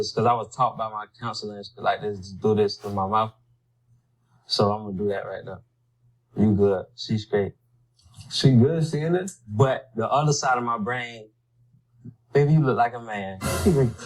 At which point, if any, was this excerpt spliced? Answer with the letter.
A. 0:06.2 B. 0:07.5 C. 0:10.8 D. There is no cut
D